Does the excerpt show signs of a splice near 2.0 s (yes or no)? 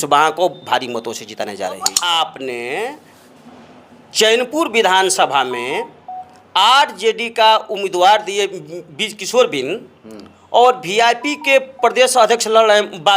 yes